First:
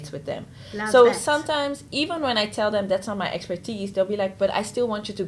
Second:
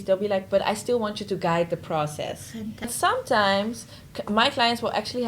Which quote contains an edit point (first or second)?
second